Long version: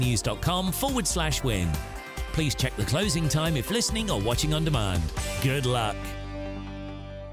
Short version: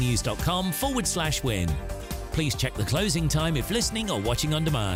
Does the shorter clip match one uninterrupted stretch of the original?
yes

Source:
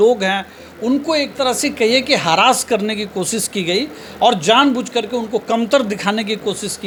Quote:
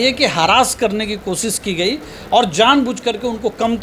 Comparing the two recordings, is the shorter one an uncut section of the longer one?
yes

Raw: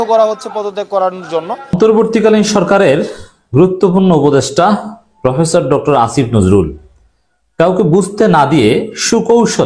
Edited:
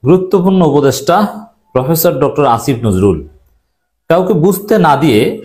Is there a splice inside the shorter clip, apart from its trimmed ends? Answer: no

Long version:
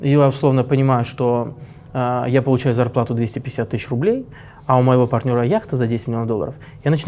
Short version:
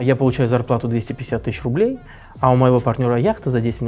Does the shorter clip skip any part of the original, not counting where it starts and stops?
no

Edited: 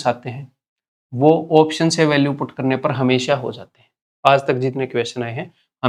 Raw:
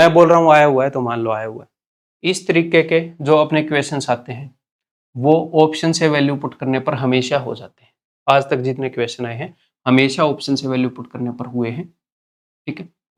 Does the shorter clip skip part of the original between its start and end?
no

